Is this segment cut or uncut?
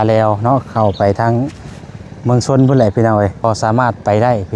cut